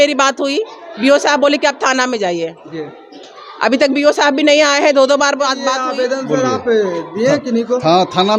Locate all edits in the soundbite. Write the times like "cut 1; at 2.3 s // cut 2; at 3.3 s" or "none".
cut 1; at 5.7 s